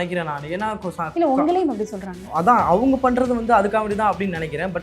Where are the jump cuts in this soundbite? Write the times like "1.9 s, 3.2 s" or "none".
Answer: 2.3 s